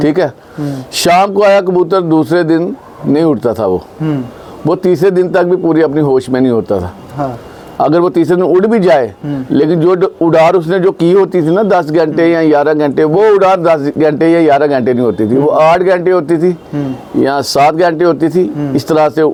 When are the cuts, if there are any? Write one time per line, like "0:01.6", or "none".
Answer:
none